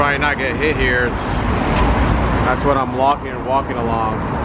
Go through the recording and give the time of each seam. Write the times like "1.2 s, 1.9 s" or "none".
none